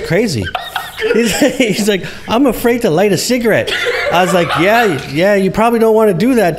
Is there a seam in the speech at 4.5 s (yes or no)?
no